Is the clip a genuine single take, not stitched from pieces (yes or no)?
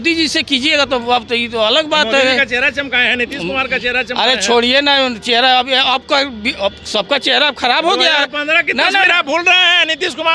yes